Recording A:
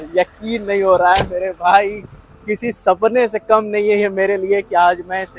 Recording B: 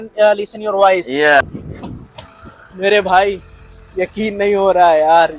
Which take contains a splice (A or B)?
B